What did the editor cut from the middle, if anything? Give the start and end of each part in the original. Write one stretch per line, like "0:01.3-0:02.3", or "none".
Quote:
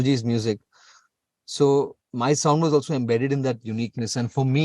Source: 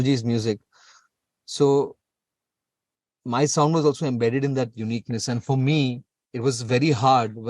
0:02.0-0:03.1